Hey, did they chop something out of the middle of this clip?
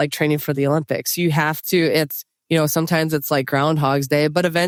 no; 0 cuts

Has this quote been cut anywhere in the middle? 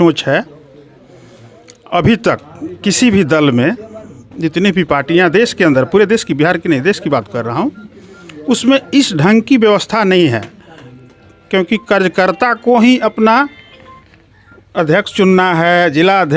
no; 0 cuts

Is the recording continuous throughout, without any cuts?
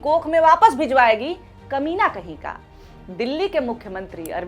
yes; 0 cuts

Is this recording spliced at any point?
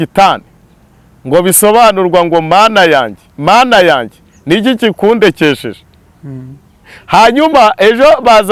no; 0 cuts

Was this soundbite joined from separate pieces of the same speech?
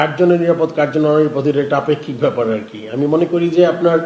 no; 0 cuts

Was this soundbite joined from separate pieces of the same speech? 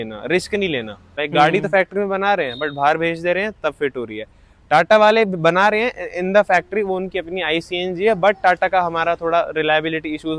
yes; 1 cut; at 1.1 s

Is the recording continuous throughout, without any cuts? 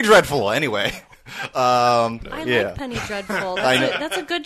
no; 1 cut; at 2.2 s

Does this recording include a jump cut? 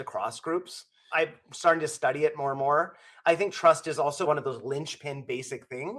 yes; 1 cut; at 1.1 s

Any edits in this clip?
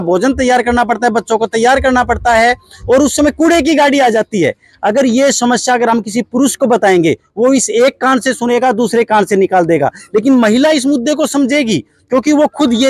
no; 0 cuts

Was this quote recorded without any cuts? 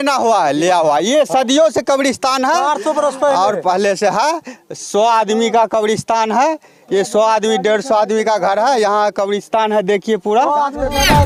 yes; 0 cuts

